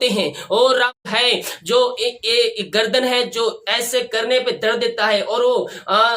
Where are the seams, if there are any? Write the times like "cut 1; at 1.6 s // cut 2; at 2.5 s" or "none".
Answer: cut 1; at 1.0 s